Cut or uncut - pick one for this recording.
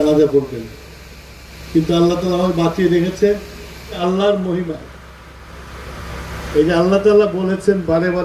cut